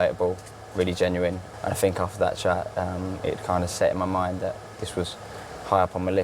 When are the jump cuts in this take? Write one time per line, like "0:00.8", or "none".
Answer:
0:01.4